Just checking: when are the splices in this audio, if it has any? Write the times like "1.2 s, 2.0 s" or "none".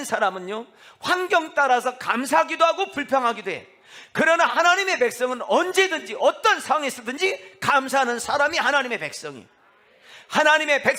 none

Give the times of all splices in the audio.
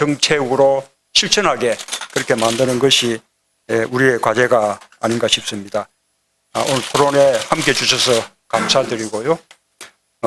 5.4 s

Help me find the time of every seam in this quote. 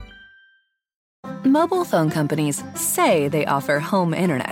1.0 s

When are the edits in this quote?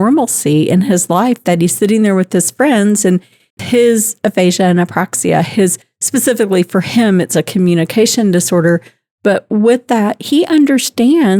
none

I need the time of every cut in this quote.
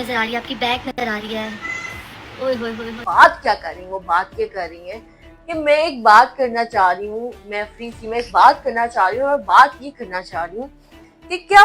3.0 s

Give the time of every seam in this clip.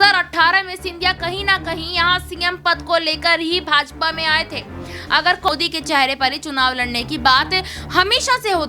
5.5 s

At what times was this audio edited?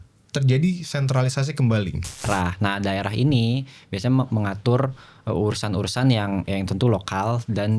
2.2 s

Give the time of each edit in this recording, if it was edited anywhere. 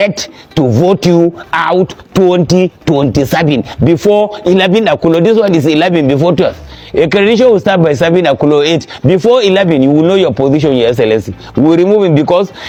none

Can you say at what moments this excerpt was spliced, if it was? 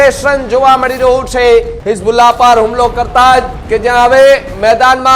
1.8 s

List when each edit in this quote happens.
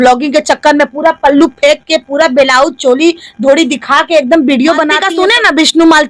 5.0 s

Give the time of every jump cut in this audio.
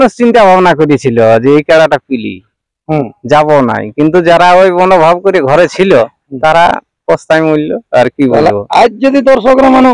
none

